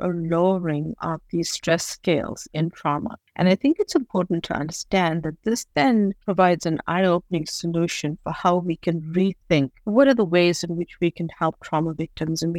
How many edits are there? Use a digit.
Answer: 3